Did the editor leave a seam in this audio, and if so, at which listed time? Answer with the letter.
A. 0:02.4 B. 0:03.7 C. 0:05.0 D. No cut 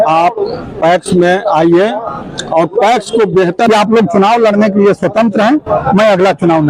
B